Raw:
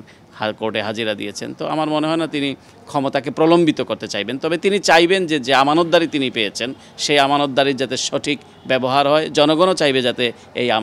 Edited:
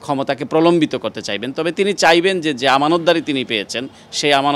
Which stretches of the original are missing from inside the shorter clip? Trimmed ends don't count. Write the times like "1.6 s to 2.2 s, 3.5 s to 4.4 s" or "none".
none